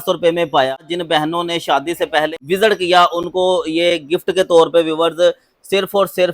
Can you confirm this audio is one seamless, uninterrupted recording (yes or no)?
no